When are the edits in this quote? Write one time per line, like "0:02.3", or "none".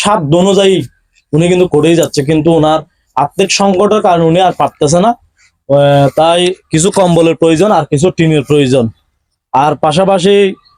none